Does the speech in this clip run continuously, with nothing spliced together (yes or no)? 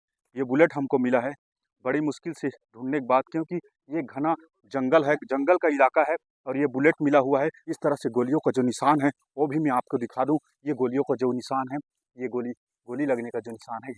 no